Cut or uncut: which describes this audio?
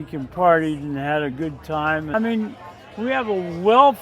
cut